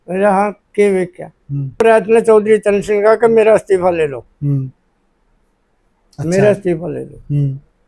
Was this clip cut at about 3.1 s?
no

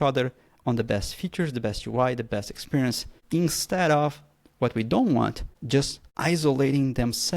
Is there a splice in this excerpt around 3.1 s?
yes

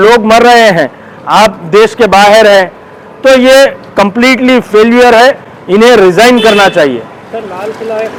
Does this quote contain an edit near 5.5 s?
no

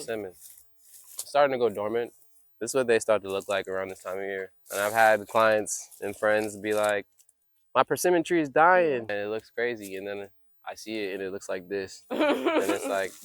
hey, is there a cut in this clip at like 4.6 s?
yes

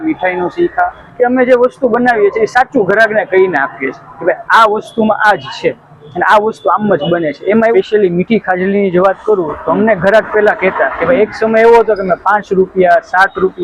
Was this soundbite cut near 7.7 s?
yes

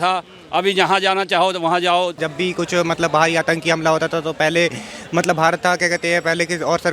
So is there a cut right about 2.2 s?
yes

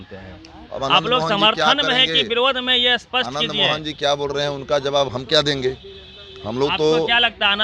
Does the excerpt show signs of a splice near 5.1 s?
yes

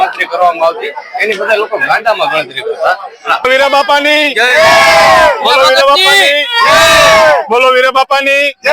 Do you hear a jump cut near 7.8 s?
no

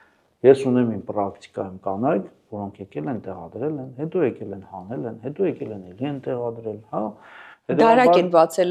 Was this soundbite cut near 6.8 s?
no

